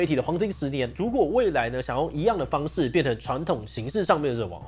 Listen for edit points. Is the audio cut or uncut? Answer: cut